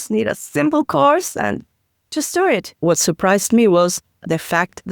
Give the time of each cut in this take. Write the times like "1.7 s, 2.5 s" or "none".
2.7 s

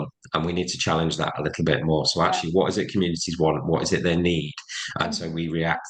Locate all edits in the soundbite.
none

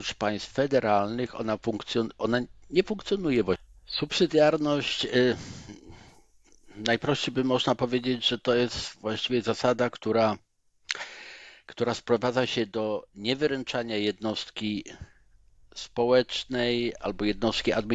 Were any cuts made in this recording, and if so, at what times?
3.7 s

